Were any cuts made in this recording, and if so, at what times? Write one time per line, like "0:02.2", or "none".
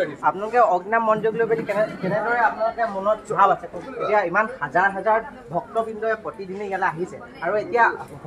0:03.9